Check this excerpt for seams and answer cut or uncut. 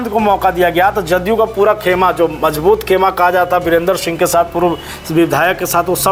uncut